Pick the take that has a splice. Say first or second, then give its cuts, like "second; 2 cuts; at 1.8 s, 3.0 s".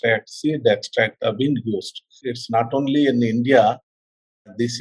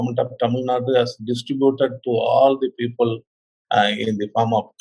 first; 1 cut; at 2.3 s